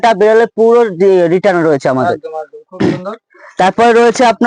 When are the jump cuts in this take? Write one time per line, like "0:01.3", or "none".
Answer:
none